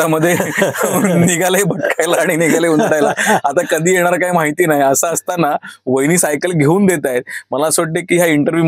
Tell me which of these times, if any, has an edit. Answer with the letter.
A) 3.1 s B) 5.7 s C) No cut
C